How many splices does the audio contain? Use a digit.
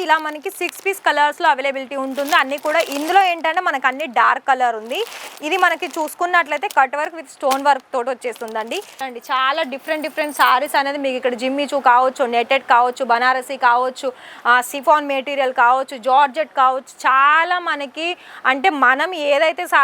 1